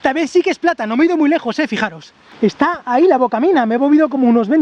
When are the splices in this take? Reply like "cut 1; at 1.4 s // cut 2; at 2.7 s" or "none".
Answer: none